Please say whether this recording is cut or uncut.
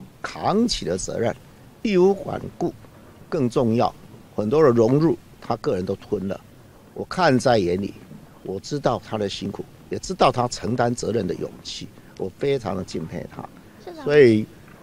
uncut